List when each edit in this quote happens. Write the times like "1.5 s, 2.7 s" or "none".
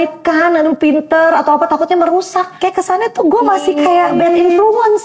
2.5 s, 4.1 s